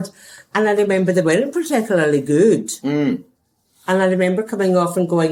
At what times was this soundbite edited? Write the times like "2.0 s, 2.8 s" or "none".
none